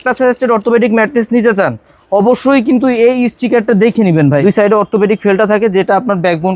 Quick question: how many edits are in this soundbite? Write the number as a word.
one